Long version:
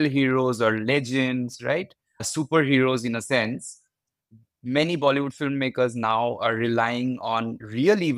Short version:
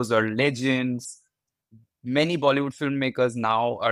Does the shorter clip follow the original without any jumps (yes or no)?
no